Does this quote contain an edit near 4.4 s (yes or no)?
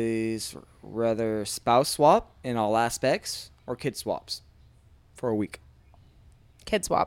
no